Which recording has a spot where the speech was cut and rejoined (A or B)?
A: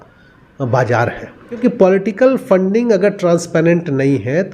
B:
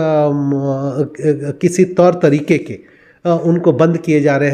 A